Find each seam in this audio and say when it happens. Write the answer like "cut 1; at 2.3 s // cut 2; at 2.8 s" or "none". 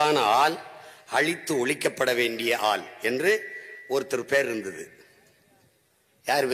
none